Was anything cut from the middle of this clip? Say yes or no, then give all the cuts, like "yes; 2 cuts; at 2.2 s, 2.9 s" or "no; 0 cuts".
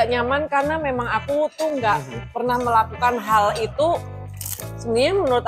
no; 0 cuts